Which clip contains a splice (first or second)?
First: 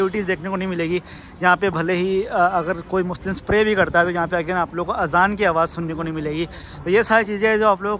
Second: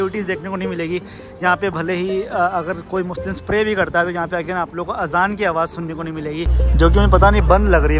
second